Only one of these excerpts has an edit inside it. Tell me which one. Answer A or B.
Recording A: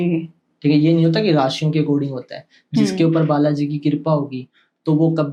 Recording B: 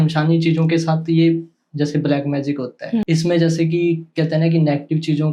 B